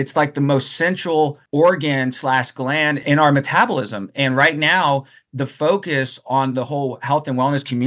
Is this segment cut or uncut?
cut